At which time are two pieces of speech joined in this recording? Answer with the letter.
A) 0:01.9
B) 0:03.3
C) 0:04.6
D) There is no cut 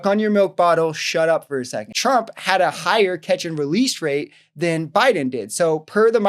A